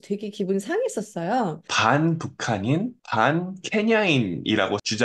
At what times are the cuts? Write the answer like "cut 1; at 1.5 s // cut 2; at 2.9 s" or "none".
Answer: cut 1; at 1.7 s